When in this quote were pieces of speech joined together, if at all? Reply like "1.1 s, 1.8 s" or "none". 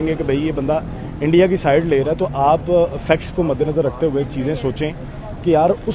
none